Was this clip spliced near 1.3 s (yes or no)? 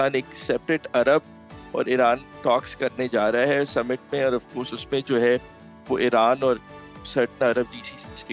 no